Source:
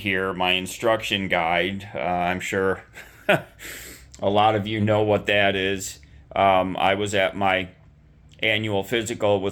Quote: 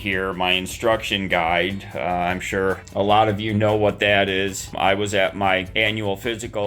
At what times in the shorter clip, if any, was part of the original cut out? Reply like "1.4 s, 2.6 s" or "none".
2.8 s, 4.7 s, 5.7 s